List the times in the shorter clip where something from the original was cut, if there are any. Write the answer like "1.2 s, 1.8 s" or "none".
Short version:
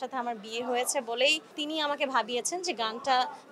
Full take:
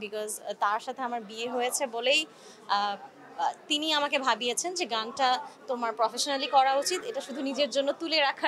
1.5 s